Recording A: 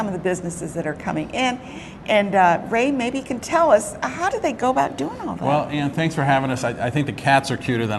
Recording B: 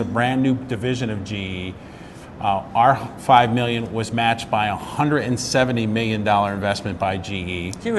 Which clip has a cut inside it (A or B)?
B